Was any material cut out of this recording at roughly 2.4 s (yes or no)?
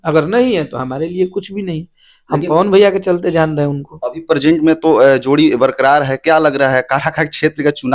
no